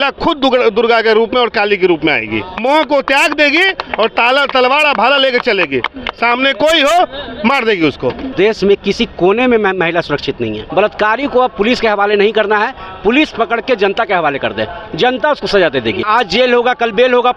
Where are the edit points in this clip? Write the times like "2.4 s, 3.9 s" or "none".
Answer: 2.6 s, 8.3 s, 10.6 s, 16.1 s

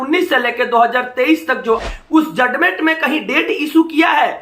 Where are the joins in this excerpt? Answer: 1.8 s

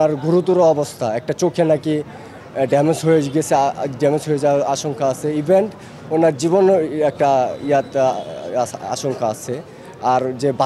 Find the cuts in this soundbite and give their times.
none

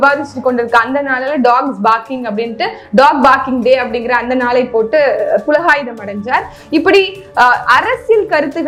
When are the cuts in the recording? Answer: none

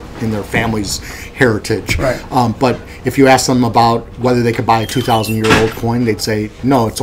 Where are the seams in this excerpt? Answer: 1.9 s

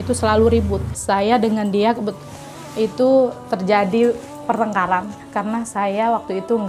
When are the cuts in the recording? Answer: 1.0 s, 5.2 s

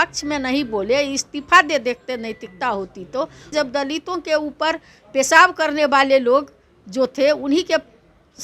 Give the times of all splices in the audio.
3.5 s

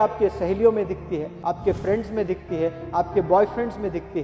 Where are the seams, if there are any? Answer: 1.3 s

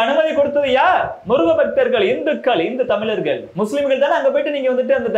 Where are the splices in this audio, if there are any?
3.5 s

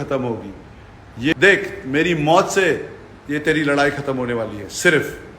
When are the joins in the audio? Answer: 1.3 s

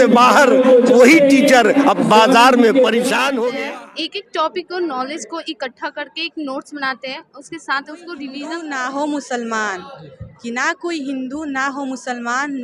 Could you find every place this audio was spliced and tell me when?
3.6 s, 8.4 s

